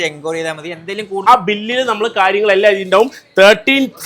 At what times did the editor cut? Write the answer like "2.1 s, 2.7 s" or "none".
1.3 s